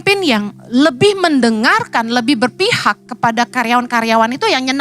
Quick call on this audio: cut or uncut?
uncut